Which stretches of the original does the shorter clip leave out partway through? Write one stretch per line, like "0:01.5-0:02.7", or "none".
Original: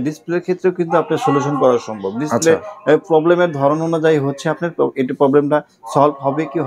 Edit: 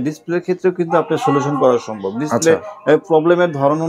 none